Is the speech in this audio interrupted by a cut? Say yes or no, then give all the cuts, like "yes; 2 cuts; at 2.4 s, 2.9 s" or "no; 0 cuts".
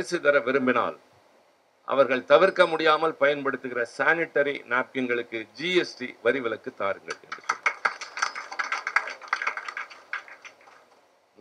no; 0 cuts